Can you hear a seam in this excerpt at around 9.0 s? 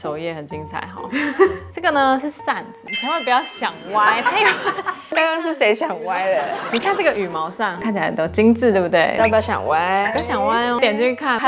no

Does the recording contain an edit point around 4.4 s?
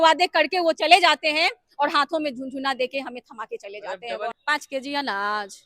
yes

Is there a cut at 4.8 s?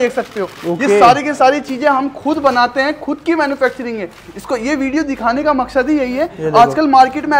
no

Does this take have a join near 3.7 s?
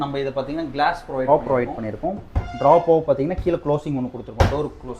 no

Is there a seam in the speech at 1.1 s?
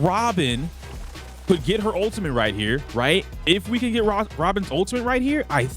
no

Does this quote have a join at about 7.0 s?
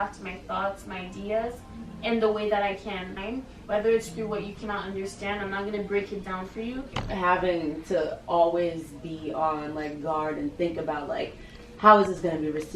yes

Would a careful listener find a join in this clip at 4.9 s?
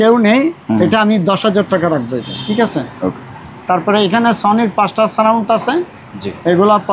no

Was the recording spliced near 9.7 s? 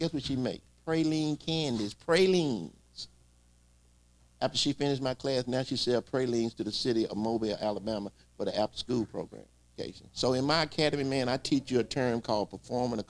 yes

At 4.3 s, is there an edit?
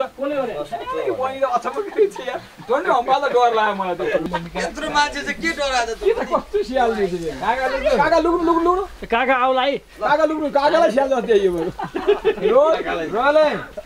yes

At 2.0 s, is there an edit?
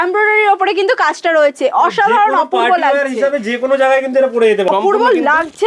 no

